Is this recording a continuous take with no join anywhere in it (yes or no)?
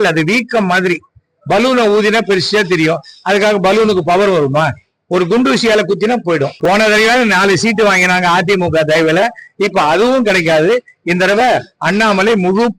no